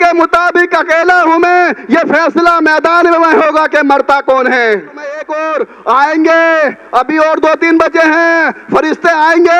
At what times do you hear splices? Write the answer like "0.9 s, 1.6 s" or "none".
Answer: 5.3 s